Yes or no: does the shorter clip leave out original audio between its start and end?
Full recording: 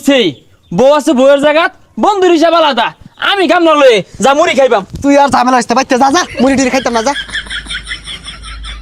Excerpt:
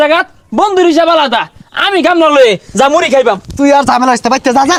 no